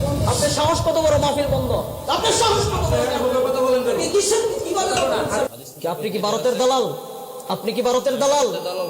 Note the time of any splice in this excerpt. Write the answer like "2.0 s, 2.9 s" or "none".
5.5 s